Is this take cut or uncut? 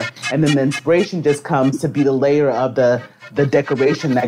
uncut